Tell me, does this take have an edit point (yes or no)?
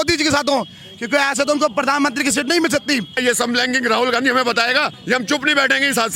yes